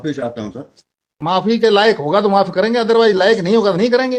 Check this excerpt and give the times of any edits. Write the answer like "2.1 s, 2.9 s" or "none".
1.4 s

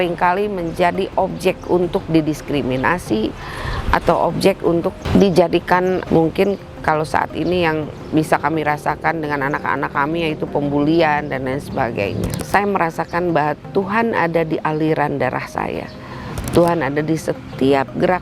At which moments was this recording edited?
12.3 s

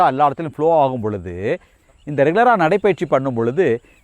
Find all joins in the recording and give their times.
1.7 s

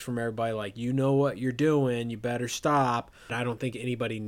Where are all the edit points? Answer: 3.3 s

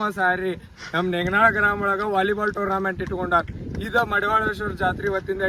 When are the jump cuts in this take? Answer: none

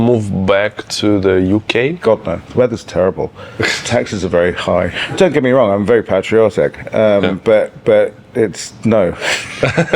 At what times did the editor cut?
2.4 s, 5.0 s

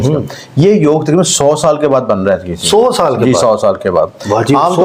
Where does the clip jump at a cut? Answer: none

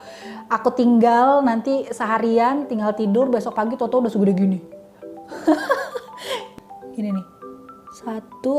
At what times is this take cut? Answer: 6.4 s

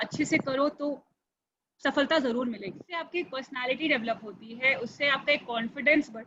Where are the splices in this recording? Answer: 2.9 s

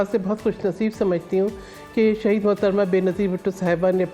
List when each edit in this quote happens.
none

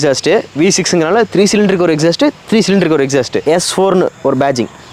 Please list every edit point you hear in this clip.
3.4 s

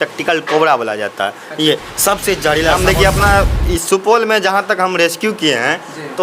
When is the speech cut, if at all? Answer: 2.9 s

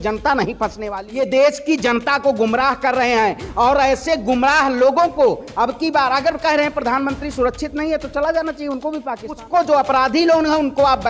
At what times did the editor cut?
1.0 s, 9.4 s

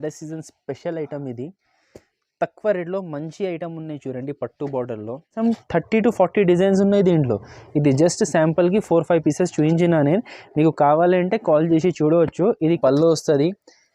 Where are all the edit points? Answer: 5.4 s, 12.8 s

